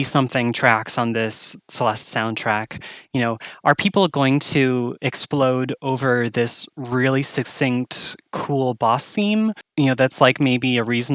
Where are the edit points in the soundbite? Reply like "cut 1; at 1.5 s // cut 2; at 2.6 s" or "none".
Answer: cut 1; at 9.6 s